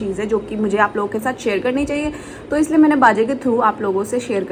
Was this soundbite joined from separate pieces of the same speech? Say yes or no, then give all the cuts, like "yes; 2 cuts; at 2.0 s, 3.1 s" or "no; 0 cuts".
no; 0 cuts